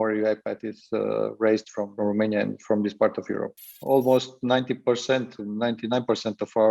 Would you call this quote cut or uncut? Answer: cut